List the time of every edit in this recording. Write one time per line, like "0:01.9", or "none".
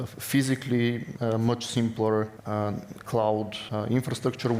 0:01.1
0:02.4
0:03.6